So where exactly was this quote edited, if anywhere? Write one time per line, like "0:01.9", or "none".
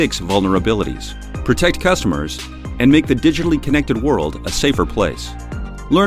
none